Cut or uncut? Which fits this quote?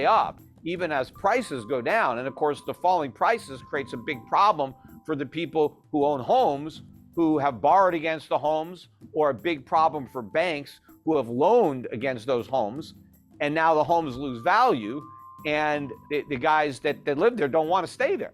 cut